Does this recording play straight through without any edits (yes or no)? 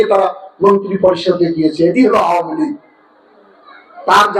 yes